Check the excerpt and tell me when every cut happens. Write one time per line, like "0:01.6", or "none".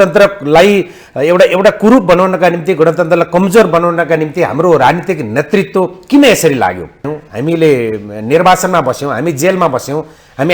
0:07.2